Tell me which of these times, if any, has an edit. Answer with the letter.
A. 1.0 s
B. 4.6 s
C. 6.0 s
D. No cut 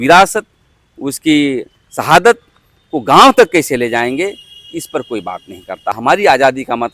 C